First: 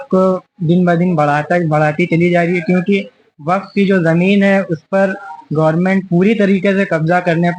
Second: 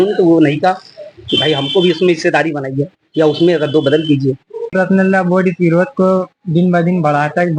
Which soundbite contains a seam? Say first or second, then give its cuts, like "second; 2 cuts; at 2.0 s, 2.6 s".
second; 1 cut; at 4.7 s